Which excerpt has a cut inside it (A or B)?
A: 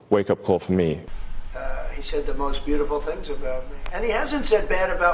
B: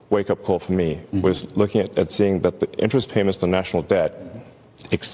A